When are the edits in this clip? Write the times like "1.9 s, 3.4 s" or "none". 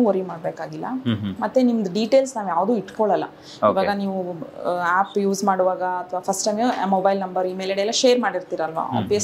none